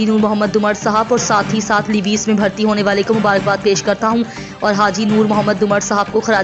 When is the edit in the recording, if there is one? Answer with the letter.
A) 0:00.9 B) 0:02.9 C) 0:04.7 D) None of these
D